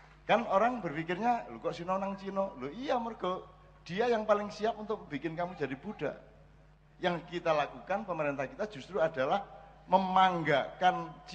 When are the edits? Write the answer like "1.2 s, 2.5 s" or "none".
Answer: 6.8 s